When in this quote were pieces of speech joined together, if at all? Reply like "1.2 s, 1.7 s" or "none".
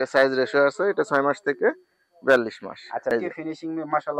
3.1 s